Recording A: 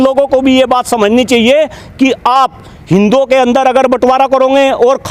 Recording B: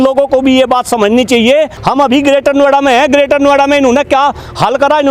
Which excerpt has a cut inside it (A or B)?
B